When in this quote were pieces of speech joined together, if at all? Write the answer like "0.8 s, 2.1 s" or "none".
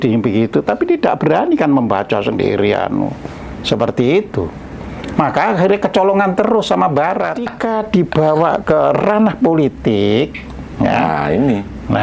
7.6 s